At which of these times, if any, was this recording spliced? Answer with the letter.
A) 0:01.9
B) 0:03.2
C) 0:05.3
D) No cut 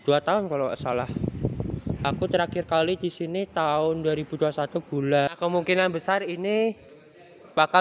C